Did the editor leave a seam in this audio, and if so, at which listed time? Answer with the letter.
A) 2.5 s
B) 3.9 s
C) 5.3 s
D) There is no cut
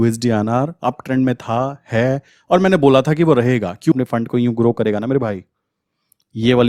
B